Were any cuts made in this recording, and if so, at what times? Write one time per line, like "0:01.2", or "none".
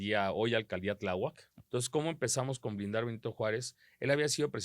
0:01.5